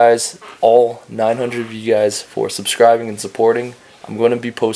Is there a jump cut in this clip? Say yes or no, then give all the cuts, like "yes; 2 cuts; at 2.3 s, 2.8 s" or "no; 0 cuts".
no; 0 cuts